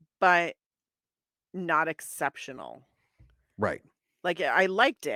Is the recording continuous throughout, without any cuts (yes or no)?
yes